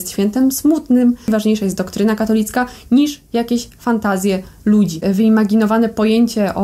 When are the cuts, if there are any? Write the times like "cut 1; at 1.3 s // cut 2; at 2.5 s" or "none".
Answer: cut 1; at 1.2 s // cut 2; at 5.0 s